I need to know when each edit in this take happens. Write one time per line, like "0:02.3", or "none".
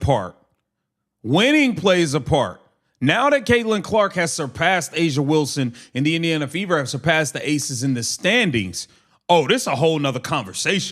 0:08.4